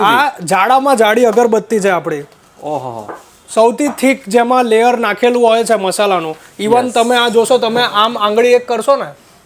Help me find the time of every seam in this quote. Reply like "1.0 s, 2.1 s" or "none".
none